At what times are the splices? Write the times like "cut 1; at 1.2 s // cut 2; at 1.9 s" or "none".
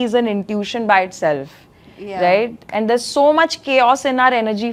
none